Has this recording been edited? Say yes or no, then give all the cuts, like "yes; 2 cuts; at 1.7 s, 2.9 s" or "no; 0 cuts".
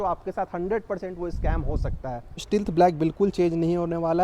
yes; 1 cut; at 2.4 s